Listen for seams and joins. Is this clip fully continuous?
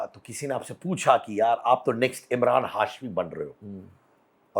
yes; 0 cuts

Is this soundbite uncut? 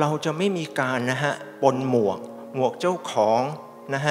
yes; 0 cuts

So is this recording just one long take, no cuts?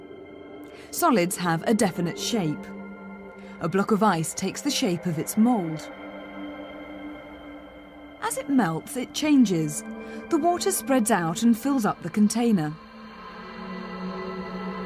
no; 1 cut; at 9.3 s

